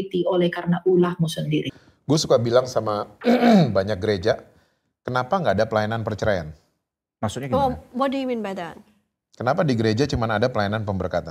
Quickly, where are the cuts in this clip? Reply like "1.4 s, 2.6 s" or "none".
1.8 s

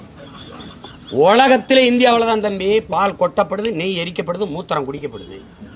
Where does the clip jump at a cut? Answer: none

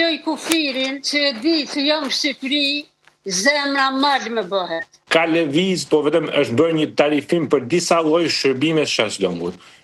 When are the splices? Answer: 5.0 s

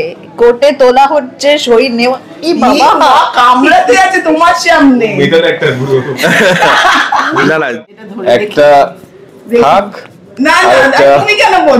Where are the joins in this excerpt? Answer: 7.8 s

